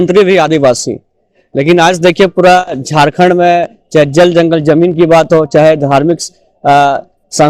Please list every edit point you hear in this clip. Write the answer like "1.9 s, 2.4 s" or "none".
none